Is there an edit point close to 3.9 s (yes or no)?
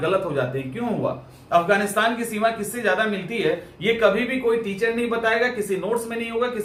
no